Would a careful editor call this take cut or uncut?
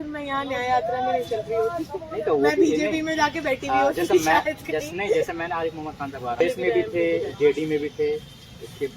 cut